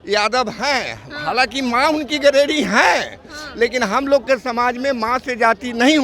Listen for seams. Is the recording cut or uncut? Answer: uncut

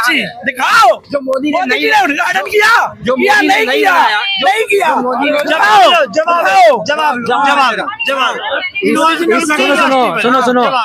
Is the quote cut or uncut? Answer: uncut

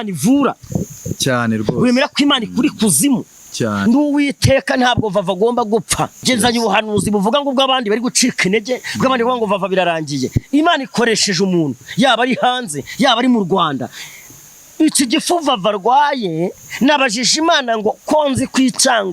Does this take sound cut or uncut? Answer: cut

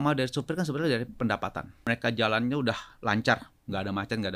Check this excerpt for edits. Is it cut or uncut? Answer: cut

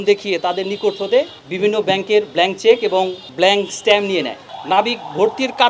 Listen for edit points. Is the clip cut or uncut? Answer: cut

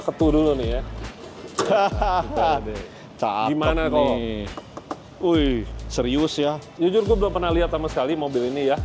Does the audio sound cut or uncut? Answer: cut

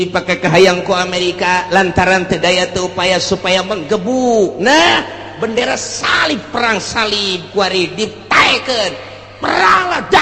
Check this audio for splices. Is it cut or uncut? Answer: uncut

